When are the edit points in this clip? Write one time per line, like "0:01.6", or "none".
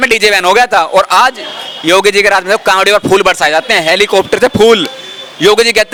none